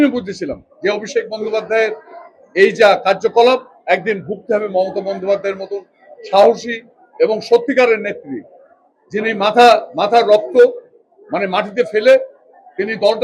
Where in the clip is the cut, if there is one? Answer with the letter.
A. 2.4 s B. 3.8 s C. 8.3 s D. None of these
D